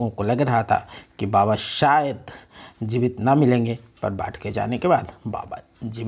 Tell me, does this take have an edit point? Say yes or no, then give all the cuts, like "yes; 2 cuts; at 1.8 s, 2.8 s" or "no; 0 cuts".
no; 0 cuts